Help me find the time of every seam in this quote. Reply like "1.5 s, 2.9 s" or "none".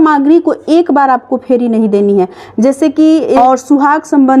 3.4 s